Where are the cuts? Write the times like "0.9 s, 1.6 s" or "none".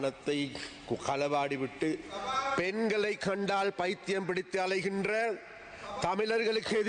2.1 s